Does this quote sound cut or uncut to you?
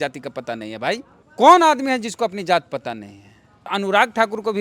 cut